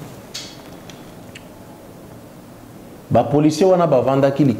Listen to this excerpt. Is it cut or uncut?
cut